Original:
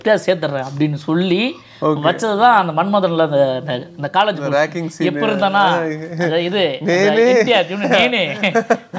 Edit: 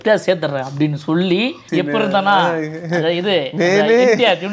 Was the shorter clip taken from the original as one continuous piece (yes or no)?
no